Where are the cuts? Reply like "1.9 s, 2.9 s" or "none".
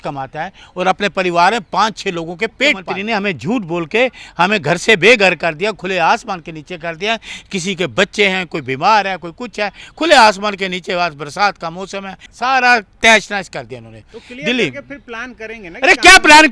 2.9 s, 12.2 s